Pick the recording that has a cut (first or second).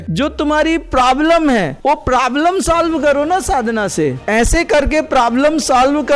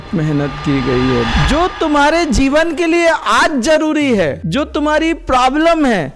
second